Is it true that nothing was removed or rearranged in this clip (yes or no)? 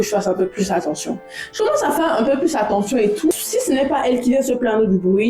no